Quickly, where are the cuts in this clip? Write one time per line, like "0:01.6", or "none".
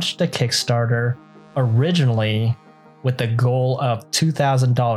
none